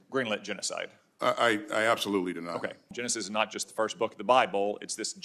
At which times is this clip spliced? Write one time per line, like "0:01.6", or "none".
0:02.9